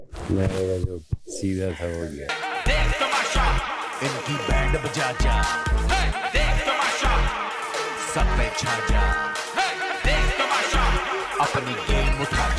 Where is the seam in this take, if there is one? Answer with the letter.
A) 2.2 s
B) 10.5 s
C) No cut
A